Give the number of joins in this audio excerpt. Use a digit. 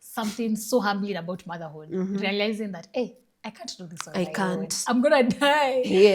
0